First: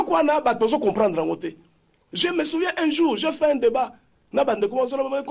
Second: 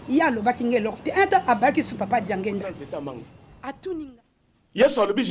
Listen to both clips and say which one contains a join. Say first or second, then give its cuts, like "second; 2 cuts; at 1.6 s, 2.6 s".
second; 1 cut; at 4.1 s